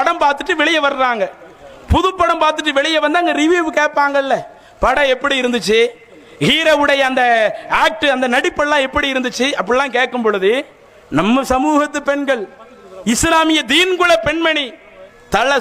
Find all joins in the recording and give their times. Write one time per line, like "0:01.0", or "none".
none